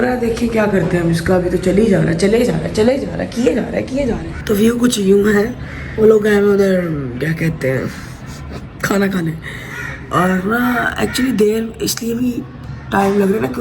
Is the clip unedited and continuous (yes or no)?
yes